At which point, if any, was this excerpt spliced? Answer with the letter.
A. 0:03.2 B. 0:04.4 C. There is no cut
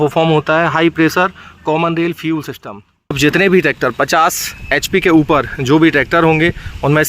A